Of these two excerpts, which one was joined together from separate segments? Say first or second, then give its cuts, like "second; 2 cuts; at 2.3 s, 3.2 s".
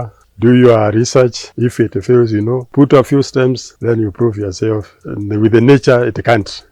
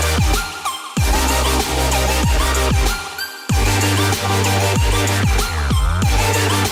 first; 2 cuts; at 2.7 s, 5.0 s